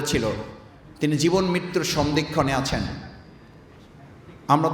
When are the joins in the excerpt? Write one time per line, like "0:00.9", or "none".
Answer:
none

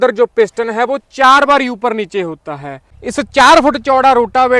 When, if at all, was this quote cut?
0:02.9

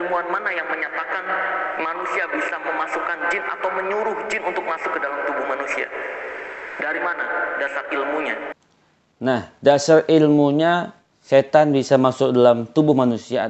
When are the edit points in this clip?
none

